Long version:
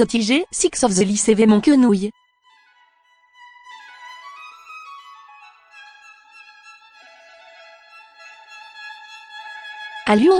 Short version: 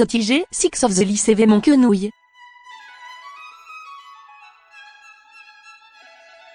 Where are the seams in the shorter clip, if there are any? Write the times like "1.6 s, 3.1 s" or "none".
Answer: 2.3 s